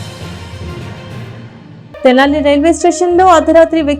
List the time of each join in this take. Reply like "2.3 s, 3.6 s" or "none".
1.5 s